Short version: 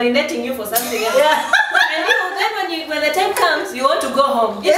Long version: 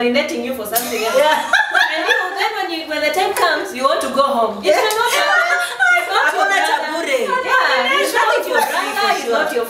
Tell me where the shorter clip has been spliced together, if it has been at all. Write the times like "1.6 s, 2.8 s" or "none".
none